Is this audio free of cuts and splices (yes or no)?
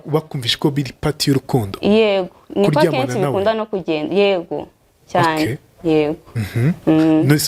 yes